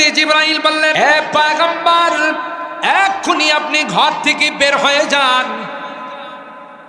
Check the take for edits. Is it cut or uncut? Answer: cut